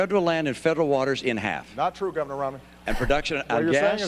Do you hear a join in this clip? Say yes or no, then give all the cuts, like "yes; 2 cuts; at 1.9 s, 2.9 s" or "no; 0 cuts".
yes; 1 cut; at 3.0 s